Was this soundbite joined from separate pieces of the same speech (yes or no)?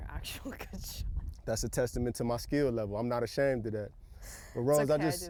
no